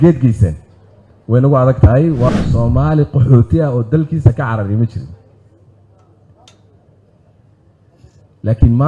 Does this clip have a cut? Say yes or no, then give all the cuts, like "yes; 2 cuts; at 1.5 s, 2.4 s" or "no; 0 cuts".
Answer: yes; 1 cut; at 2.3 s